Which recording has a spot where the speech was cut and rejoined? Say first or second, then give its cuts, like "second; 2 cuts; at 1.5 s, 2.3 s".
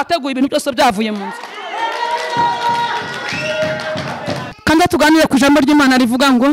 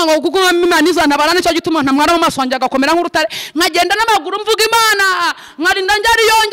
first; 1 cut; at 4.5 s